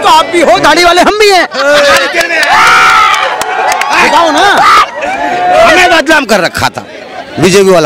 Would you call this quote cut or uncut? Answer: uncut